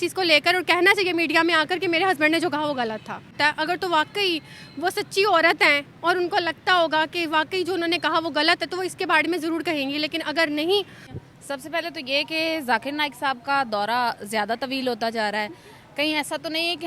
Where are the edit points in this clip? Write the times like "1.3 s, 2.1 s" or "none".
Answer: 3.3 s, 11.1 s